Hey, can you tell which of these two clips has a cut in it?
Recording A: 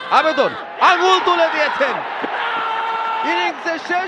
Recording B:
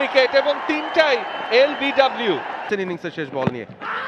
B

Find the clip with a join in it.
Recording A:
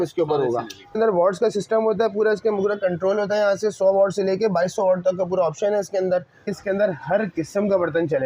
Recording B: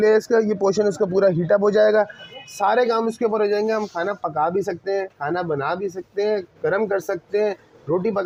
A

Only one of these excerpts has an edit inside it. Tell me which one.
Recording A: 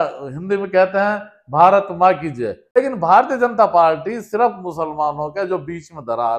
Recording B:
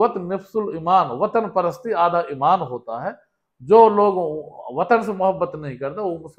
A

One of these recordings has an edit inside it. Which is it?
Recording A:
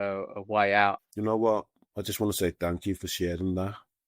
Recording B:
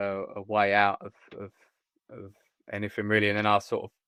A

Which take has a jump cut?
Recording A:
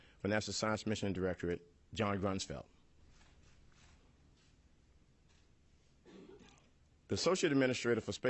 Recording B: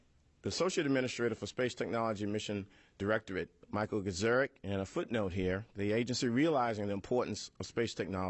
A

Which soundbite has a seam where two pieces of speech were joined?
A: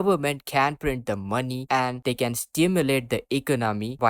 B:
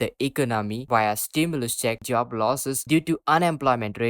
B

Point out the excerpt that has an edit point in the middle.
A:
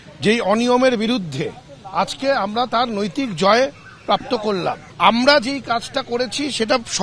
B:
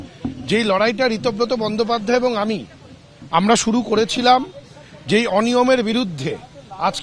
A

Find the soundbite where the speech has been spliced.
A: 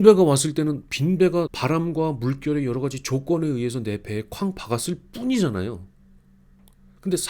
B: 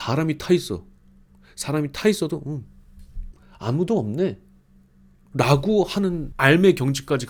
A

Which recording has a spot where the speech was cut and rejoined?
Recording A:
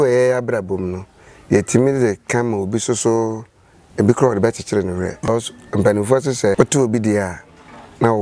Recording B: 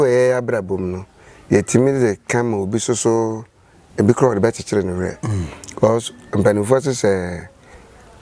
A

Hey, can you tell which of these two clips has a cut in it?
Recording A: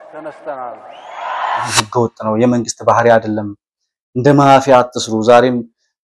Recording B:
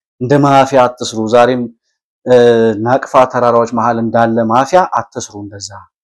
A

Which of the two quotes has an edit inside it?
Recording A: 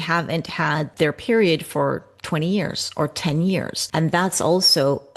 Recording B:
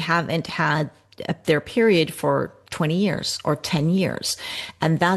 A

